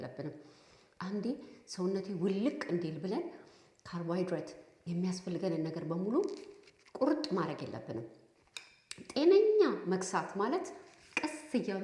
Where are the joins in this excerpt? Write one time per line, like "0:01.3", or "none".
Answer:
none